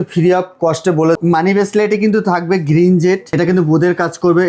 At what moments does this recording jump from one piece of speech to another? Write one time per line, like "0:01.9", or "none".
0:01.2
0:03.3